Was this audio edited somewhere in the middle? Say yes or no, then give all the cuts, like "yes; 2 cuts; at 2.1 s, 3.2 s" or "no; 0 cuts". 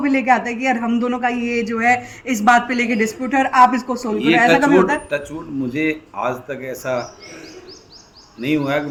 no; 0 cuts